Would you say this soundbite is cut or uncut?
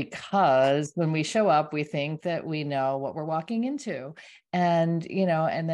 uncut